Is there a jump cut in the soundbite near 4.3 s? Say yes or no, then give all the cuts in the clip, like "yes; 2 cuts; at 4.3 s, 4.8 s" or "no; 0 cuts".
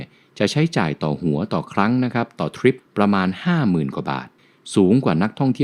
yes; 2 cuts; at 2.8 s, 4.3 s